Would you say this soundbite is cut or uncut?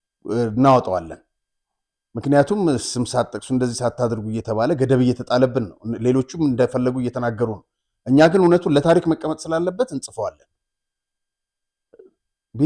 uncut